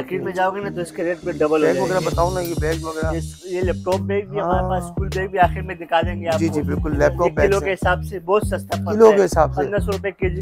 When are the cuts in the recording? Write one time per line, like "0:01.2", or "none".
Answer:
0:01.6